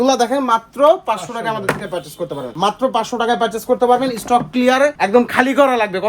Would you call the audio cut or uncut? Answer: uncut